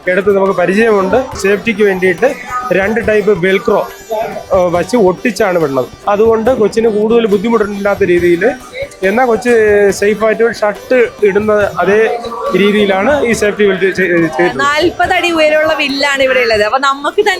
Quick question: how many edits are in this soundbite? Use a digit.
3